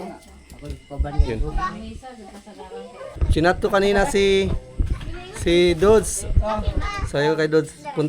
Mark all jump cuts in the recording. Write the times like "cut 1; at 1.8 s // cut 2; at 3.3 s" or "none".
cut 1; at 3.1 s

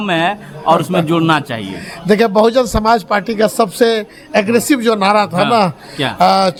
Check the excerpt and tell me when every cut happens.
none

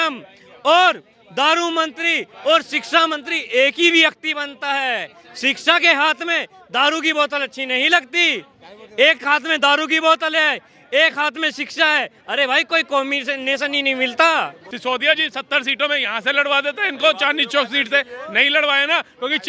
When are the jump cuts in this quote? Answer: cut 1; at 14.6 s

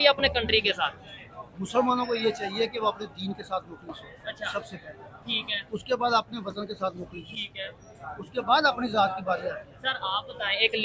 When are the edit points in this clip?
none

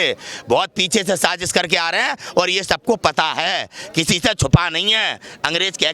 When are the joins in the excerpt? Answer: none

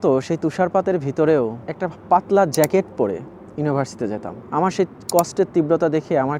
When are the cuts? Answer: cut 1; at 1.6 s // cut 2; at 4.3 s

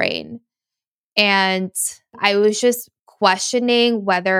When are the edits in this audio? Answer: cut 1; at 2.1 s

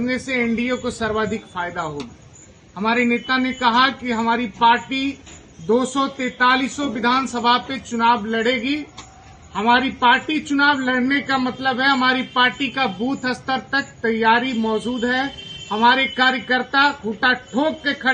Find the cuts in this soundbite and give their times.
none

